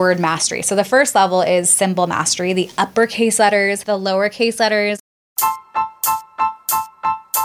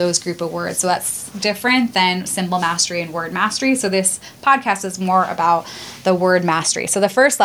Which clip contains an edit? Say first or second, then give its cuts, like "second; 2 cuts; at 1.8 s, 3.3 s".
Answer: first; 2 cuts; at 3.8 s, 5.0 s